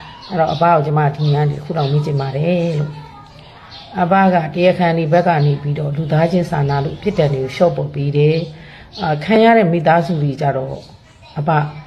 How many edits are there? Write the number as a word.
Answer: zero